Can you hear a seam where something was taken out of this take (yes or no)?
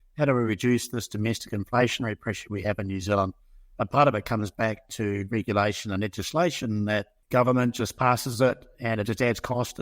yes